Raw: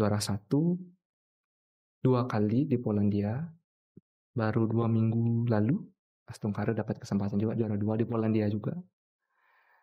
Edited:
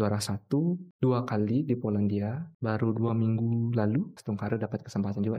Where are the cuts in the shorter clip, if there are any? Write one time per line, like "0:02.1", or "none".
0:00.9
0:02.5
0:04.2